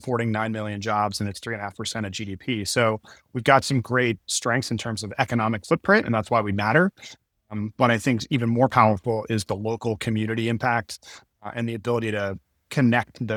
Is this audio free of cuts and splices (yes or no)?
yes